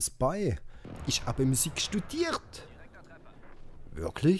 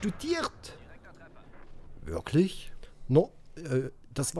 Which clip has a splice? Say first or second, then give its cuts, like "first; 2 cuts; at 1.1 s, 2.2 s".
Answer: first; 1 cut; at 1.0 s